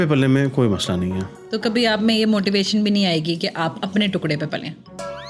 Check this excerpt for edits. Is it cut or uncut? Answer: cut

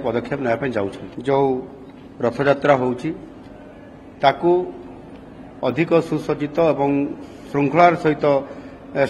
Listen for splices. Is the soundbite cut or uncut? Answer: cut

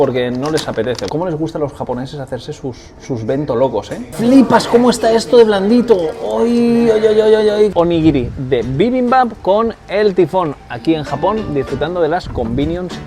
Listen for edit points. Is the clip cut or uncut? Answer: cut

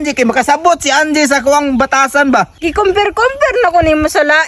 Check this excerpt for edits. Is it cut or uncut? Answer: cut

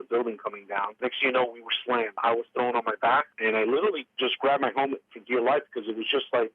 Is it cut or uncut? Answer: cut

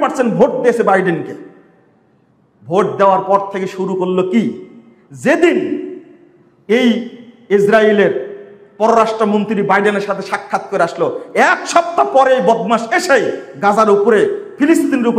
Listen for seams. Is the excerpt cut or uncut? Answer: uncut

